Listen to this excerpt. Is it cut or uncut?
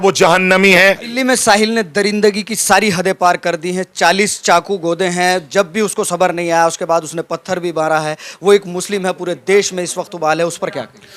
cut